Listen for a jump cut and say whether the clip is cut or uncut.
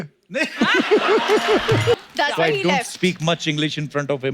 cut